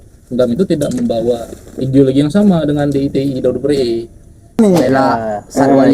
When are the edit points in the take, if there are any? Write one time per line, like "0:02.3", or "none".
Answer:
0:04.6